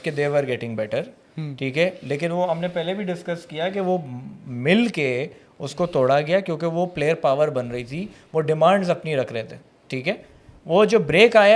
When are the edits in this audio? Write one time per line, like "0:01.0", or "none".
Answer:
none